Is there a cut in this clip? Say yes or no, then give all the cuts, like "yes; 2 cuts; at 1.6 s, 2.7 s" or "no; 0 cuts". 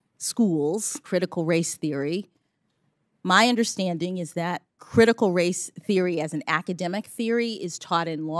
no; 0 cuts